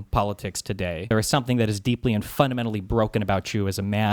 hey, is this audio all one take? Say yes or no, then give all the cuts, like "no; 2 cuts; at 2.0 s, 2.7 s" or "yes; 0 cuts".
no; 1 cut; at 1.0 s